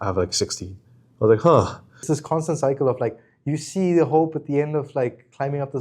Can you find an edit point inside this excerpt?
yes; 1 cut; at 1.9 s

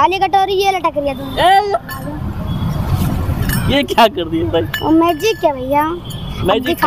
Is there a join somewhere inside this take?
no; 0 cuts

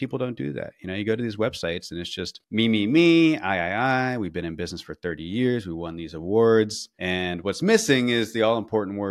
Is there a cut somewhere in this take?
no; 0 cuts

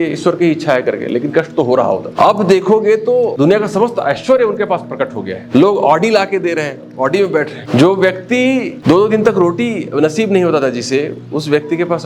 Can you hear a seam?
yes; 5 cuts; at 2.1 s, 3.3 s, 5.3 s, 7.6 s, 8.7 s

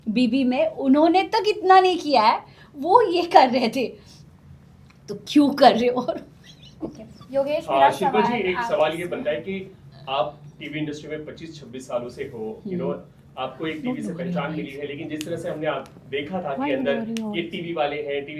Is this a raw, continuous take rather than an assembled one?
yes; 0 cuts

